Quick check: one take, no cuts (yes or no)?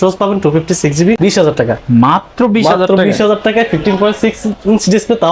no